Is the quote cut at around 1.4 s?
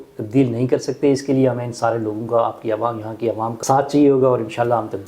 no; 1 cut; at 3.5 s

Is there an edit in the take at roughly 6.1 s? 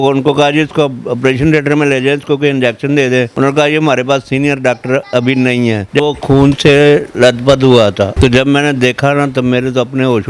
yes; 1 cut; at 6.1 s

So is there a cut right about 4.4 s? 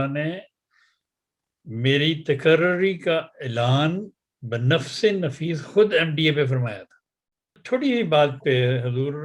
no; 1 cut; at 7.6 s

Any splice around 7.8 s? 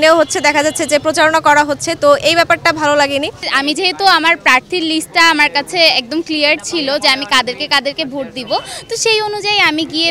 no; 1 cut; at 3.5 s

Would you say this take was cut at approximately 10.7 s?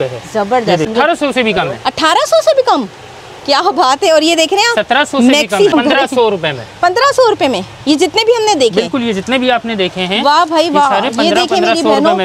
no; 2 cuts; at 0.9 s, 5.7 s

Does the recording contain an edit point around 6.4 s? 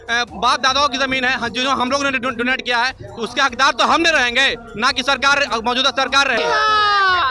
yes; 1 cut; at 6.4 s

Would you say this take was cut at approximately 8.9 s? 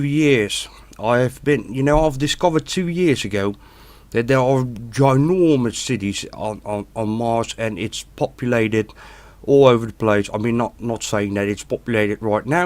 no; 1 cut; at 3.6 s

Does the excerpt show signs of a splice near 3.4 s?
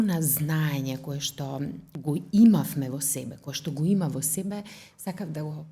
no; 1 cut; at 1.9 s

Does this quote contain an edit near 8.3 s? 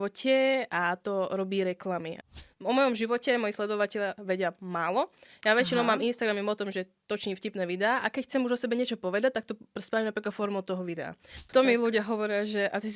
no; 2 cuts; at 2.1 s, 11.3 s

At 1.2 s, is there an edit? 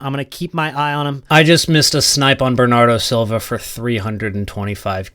yes; 1 cut; at 1.2 s

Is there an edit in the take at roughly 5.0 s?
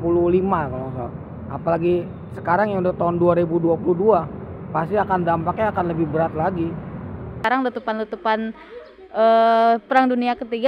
no; 1 cut; at 7.4 s

